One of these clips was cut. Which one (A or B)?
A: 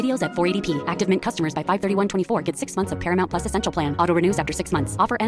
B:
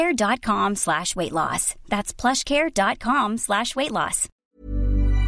B